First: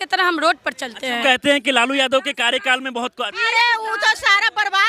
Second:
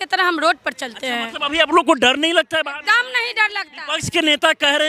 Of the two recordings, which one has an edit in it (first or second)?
first